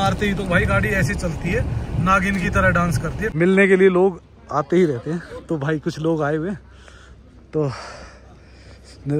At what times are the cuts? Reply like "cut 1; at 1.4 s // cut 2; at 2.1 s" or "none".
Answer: cut 1; at 3.2 s